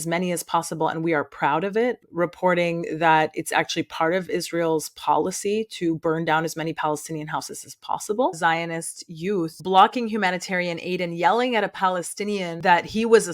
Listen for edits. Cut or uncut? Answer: cut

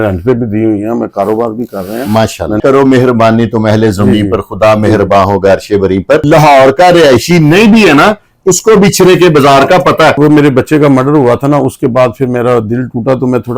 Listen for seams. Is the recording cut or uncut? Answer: cut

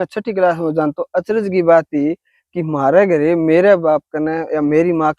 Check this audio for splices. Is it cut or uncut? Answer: uncut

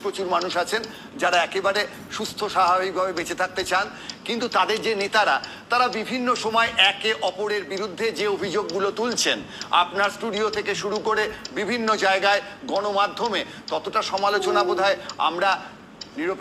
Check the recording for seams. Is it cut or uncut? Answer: uncut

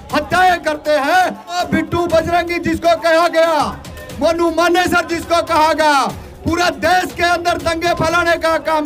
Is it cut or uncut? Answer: cut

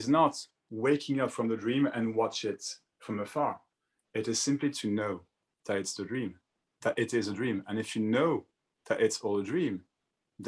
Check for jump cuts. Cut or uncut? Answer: uncut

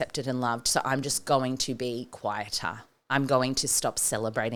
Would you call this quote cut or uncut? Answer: uncut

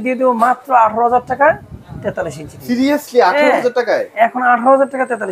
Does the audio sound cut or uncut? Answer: uncut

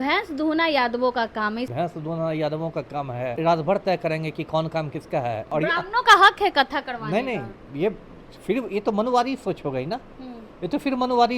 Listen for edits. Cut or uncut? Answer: cut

